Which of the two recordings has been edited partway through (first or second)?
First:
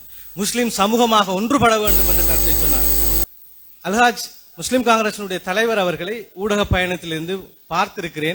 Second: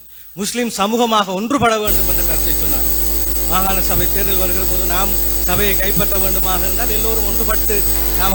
first